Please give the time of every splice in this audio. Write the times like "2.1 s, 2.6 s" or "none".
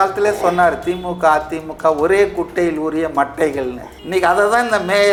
none